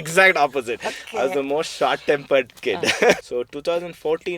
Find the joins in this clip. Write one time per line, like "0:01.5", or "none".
0:03.2